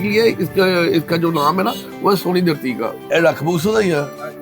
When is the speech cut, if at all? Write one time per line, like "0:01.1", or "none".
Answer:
0:03.0